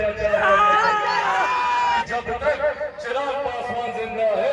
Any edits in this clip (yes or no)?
yes